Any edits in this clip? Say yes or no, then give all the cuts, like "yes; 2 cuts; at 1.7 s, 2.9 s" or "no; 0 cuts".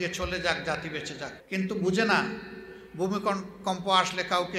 yes; 1 cut; at 1.4 s